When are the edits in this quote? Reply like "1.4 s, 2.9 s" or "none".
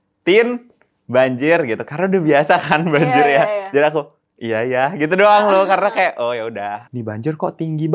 6.8 s